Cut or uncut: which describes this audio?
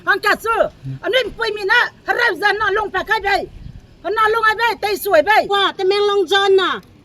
cut